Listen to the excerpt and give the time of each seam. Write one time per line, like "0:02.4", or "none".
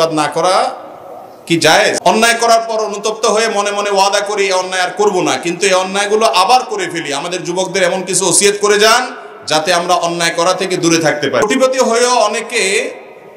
0:02.1
0:11.5